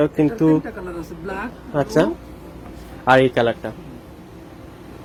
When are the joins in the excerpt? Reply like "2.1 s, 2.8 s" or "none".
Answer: none